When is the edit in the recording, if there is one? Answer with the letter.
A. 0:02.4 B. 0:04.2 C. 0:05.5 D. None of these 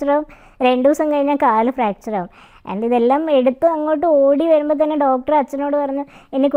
D